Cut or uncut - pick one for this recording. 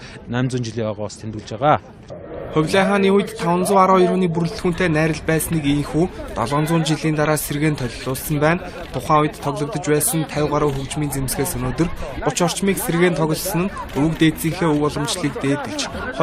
cut